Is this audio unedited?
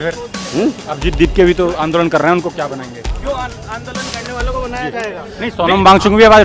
yes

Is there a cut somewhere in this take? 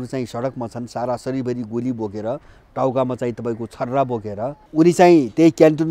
yes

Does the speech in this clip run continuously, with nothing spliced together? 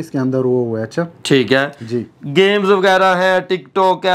yes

